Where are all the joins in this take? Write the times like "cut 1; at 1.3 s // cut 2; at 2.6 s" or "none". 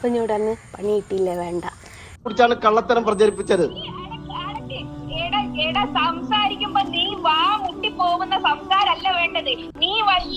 cut 1; at 2.2 s